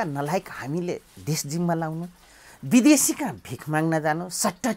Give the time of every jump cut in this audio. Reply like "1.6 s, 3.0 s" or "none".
none